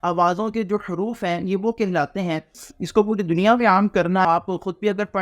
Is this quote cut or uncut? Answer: cut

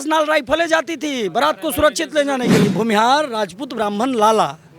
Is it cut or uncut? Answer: cut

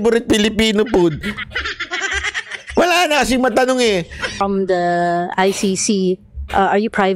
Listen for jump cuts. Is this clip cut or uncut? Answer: cut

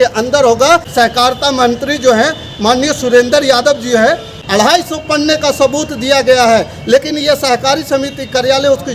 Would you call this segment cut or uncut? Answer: cut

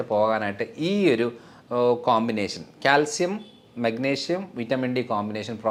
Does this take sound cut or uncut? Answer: uncut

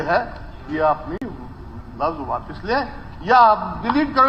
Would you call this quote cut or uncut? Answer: uncut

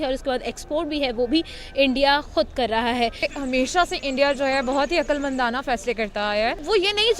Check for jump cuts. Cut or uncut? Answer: cut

